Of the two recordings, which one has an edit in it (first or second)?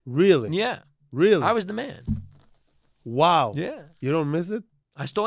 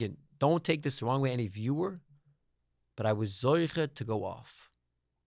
first